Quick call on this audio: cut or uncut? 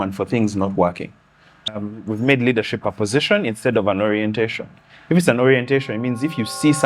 cut